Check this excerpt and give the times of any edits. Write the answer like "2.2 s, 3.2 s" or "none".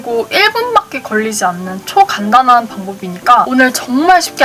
3.5 s